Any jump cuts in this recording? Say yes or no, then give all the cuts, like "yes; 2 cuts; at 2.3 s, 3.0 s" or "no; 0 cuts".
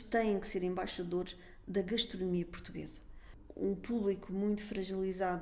yes; 1 cut; at 3.3 s